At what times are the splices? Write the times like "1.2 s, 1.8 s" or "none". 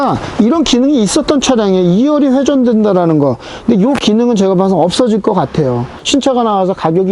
5.9 s

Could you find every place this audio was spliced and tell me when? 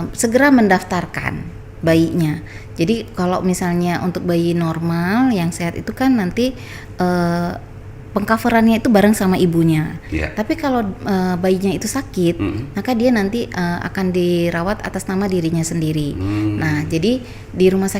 none

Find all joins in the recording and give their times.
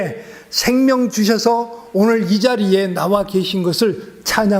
none

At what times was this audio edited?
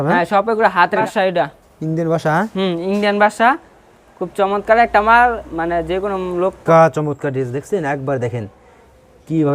1.0 s, 6.6 s

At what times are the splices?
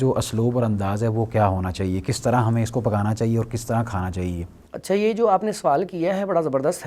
none

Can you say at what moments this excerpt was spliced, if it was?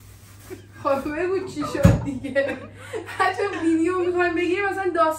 none

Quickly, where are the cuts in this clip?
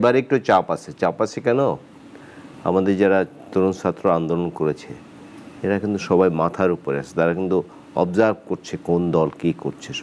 none

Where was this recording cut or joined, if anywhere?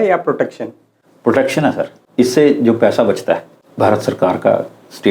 2.0 s, 3.6 s

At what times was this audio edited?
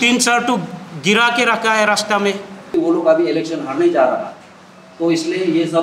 2.7 s

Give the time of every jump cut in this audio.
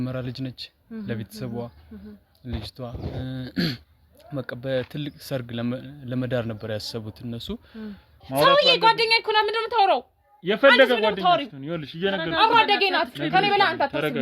8.1 s

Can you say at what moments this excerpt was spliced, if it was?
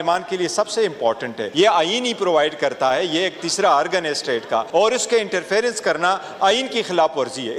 1.4 s, 4.7 s

